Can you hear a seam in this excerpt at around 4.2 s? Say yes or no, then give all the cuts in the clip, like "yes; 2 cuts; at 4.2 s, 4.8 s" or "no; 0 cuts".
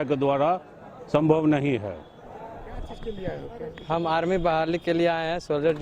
no; 1 cut; at 2.9 s